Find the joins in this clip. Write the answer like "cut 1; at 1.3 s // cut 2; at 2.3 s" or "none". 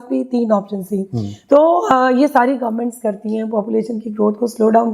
cut 1; at 1.3 s